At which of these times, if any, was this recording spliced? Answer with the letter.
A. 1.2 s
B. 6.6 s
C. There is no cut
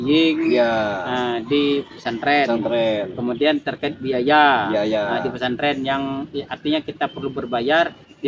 C